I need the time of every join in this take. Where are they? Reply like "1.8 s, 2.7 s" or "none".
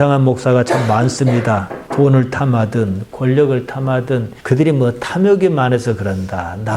4.3 s